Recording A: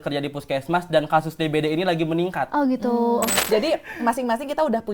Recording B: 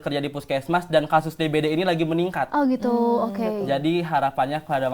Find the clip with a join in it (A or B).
A